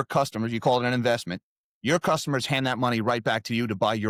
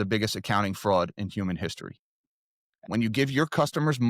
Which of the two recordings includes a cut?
second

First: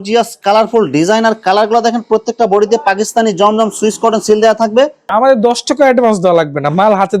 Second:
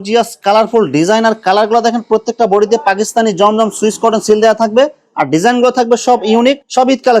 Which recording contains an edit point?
first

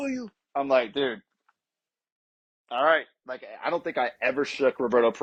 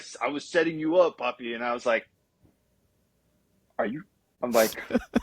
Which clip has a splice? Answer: second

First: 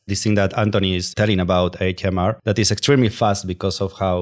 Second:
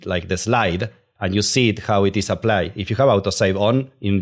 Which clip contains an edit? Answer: first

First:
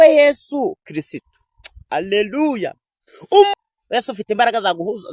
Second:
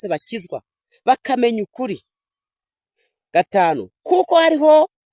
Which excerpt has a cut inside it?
first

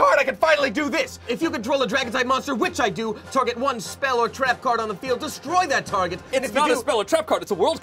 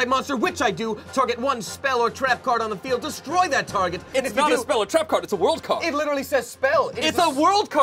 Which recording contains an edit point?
first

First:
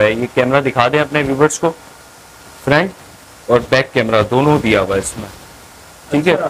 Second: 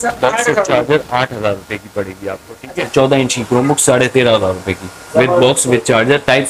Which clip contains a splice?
second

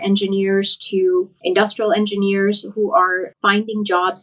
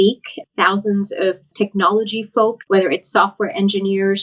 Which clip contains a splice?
second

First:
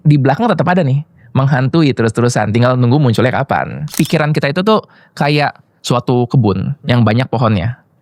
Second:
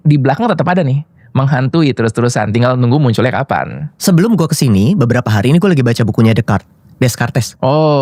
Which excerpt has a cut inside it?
first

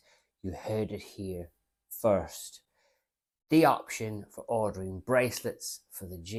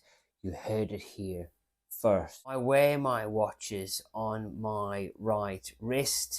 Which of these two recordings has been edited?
second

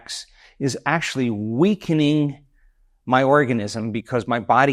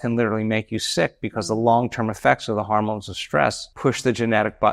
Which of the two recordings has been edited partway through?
second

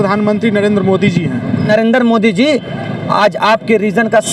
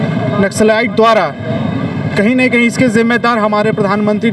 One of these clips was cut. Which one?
first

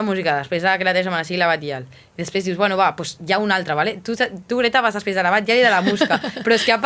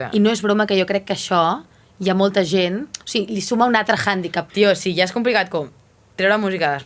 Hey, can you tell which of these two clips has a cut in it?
second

